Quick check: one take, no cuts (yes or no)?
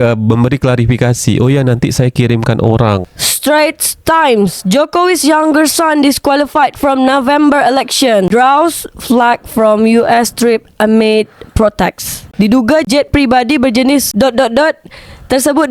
no